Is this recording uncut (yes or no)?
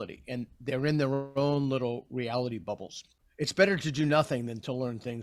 no